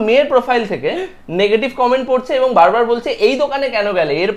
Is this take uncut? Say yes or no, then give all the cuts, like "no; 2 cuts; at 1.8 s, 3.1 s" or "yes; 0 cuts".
yes; 0 cuts